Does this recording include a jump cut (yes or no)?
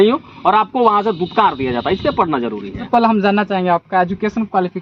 yes